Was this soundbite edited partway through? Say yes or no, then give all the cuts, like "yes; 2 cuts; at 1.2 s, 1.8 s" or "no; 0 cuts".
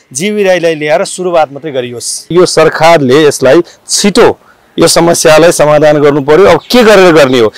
yes; 1 cut; at 2.3 s